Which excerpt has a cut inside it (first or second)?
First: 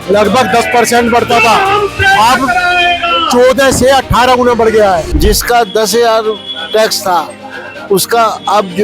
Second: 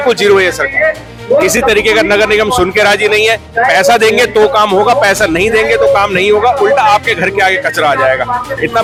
first